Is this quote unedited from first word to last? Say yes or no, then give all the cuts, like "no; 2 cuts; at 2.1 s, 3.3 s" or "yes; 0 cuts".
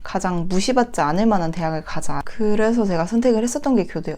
no; 1 cut; at 2.2 s